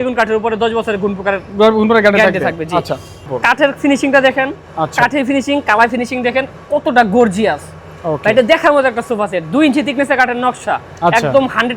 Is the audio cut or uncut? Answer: cut